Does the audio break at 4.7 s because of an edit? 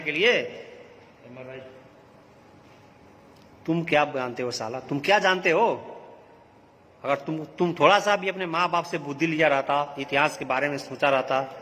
yes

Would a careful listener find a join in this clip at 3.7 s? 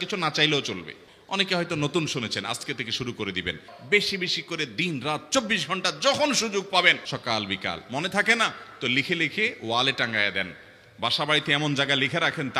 yes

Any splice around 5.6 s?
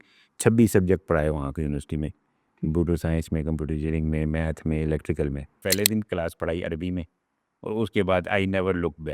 yes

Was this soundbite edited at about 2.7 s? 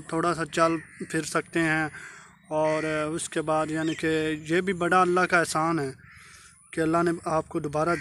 no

